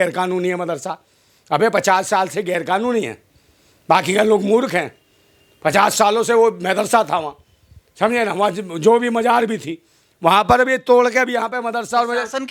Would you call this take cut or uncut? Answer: uncut